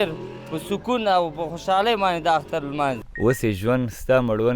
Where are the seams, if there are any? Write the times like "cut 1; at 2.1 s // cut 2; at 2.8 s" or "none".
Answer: cut 1; at 3.0 s